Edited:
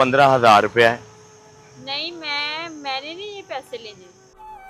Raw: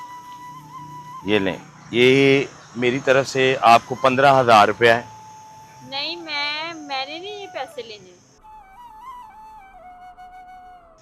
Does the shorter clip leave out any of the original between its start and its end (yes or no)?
no